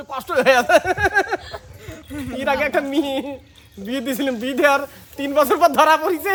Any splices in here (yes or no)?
no